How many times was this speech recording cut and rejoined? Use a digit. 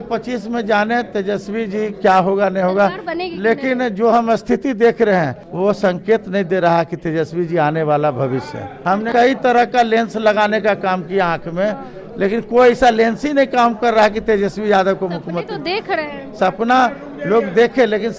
3